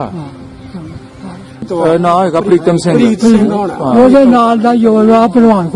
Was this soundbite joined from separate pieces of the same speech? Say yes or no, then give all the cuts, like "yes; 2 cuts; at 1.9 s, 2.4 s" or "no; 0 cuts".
yes; 1 cut; at 1.7 s